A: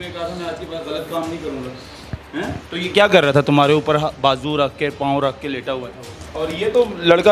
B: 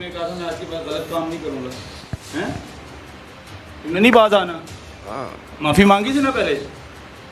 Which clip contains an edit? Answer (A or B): A